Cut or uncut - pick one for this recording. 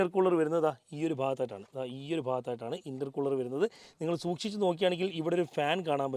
uncut